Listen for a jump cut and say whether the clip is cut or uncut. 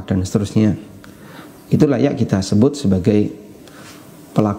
uncut